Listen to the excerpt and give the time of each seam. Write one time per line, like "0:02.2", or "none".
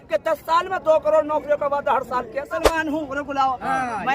0:02.4